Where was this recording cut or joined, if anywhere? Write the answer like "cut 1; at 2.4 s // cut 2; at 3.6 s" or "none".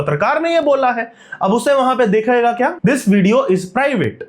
cut 1; at 2.8 s